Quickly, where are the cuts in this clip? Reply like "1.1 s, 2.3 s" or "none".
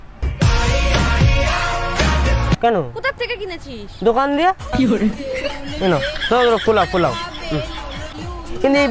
2.6 s, 8.1 s